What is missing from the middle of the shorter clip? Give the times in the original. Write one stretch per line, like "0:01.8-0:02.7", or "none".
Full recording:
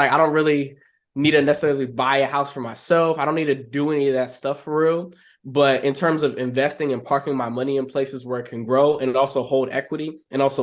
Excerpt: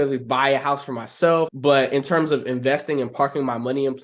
0:03.2-0:05.4